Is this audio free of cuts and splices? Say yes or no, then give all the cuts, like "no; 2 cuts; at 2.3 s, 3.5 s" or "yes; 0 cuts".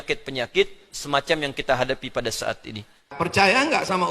no; 1 cut; at 3.1 s